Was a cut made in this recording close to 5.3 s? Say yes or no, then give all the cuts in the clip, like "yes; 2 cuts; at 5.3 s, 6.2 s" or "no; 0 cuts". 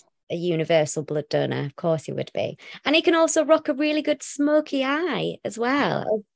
no; 0 cuts